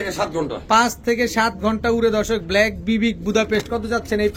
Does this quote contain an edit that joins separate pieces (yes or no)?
no